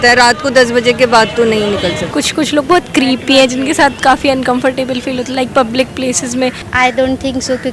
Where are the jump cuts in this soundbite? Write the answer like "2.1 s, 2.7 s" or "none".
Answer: 2.1 s, 6.6 s